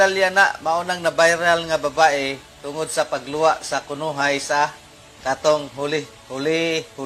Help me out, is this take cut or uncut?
uncut